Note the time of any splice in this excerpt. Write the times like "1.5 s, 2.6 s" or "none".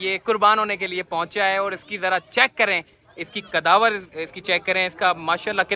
none